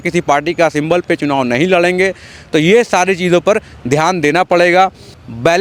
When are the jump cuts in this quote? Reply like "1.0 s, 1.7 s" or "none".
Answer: none